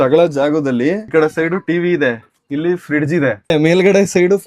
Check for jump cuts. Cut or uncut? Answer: cut